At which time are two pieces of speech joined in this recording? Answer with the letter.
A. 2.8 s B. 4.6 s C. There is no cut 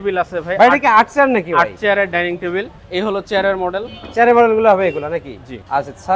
C